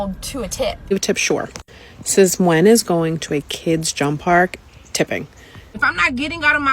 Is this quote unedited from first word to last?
no; 2 cuts; at 0.9 s, 5.6 s

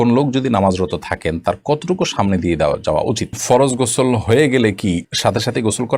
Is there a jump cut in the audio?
yes; 1 cut; at 3.4 s

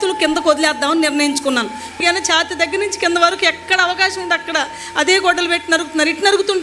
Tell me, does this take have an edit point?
yes; 1 cut; at 1.9 s

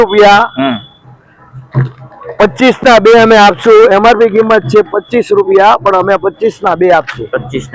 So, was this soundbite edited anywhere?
no; 0 cuts

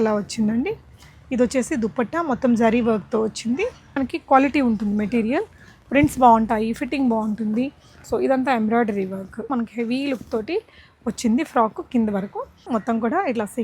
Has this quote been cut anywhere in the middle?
yes; 3 cuts; at 3.9 s, 9.5 s, 12.7 s

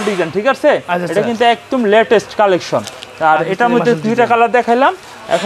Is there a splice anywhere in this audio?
no; 0 cuts

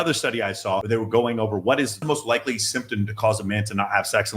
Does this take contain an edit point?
yes; 2 cuts; at 0.8 s, 2.0 s

